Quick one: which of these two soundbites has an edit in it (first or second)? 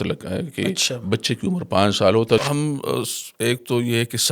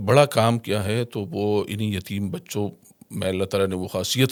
first